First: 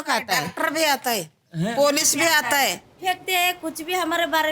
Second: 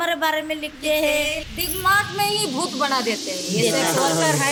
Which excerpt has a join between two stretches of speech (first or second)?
first